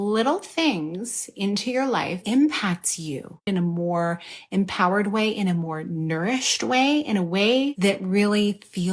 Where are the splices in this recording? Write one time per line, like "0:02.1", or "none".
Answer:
0:02.2
0:03.5
0:07.8